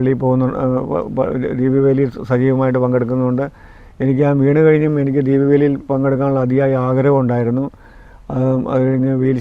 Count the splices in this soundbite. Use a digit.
0